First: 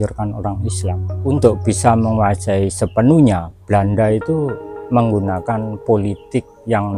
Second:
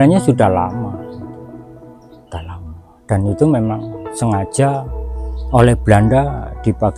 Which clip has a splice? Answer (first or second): first